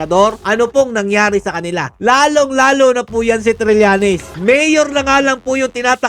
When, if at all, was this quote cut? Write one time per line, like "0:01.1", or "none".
0:04.3